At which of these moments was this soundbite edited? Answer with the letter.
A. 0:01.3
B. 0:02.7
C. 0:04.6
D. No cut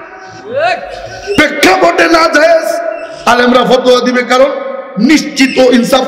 D